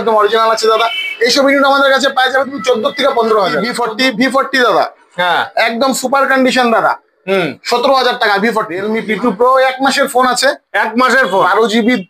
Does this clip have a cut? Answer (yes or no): yes